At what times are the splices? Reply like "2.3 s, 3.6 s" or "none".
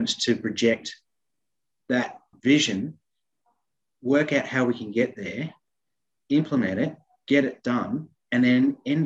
2.3 s